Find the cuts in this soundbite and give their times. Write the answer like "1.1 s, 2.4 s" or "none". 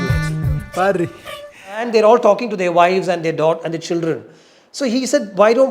1.8 s